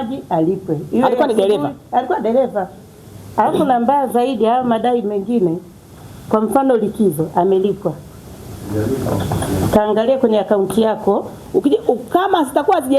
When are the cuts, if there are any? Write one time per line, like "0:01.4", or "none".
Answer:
0:11.4